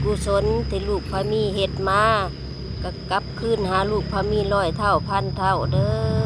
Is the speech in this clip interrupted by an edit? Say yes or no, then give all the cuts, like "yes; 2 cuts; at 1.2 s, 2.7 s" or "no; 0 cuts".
no; 0 cuts